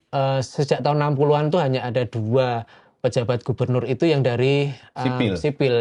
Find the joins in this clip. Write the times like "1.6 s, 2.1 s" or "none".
none